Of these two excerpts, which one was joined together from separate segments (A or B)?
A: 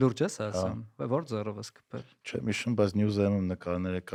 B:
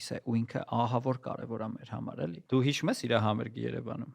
B